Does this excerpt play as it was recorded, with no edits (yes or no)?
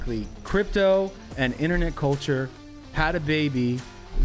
yes